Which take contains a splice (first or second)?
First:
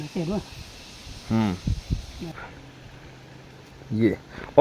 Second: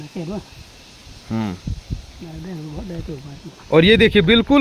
first